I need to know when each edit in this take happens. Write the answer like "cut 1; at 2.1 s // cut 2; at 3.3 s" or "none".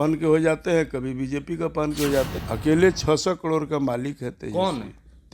cut 1; at 2.3 s

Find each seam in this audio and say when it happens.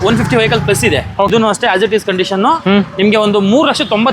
cut 1; at 1.3 s

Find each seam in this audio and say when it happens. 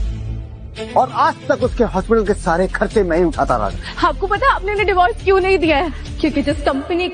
cut 1; at 1.6 s

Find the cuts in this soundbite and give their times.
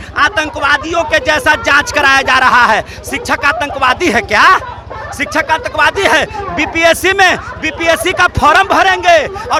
none

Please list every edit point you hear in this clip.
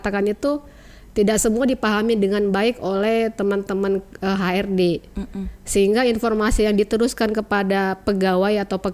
none

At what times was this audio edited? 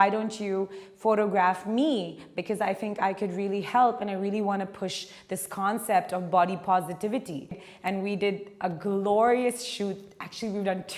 cut 1; at 7.7 s

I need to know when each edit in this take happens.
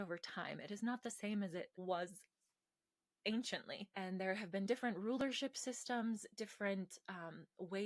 cut 1; at 1.8 s // cut 2; at 3.8 s

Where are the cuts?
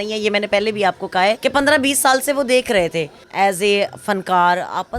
cut 1; at 1.4 s // cut 2; at 3.1 s

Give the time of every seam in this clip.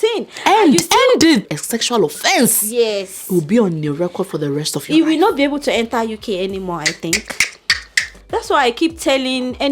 cut 1; at 1.5 s // cut 2; at 8.1 s

